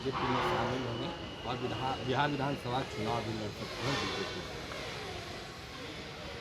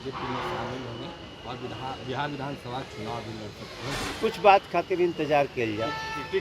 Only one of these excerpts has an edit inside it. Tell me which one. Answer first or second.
second